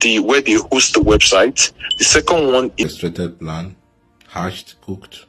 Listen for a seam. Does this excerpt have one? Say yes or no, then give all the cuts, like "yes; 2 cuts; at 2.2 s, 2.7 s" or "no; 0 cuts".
yes; 1 cut; at 2.9 s